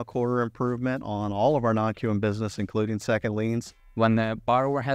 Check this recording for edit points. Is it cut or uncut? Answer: cut